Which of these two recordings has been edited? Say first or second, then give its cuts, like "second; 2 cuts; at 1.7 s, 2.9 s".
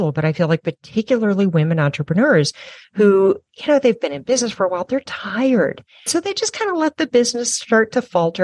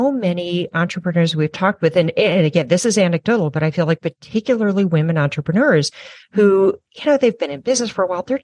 first; 1 cut; at 6.1 s